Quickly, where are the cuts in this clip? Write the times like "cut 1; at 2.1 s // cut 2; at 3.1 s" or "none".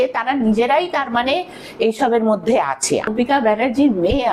cut 1; at 3.1 s